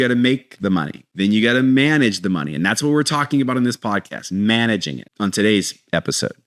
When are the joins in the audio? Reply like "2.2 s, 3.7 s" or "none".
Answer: 1.0 s, 5.0 s